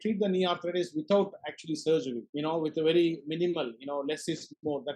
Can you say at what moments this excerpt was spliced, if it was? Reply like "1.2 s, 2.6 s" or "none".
2.2 s